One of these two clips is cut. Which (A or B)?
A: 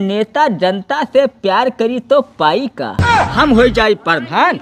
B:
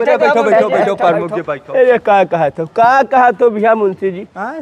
A